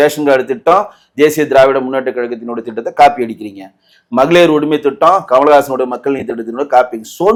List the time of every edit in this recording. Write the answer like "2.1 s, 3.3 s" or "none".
none